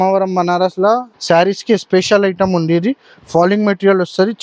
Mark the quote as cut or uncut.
cut